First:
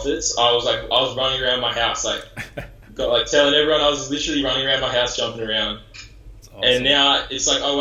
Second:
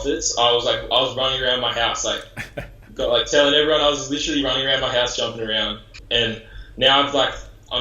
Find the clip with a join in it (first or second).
second